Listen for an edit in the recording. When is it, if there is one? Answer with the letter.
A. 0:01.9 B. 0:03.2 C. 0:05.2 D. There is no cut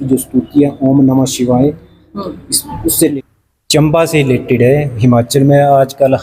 B